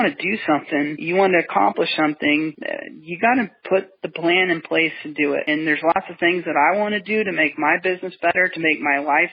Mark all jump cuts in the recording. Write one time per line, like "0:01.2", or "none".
0:01.0
0:05.4